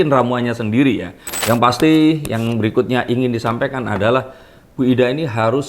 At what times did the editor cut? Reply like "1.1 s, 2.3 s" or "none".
1.3 s